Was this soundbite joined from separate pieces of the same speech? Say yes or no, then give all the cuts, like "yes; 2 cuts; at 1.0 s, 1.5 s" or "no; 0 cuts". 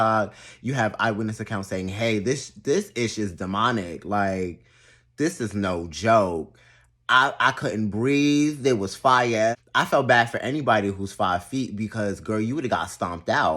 yes; 1 cut; at 9.6 s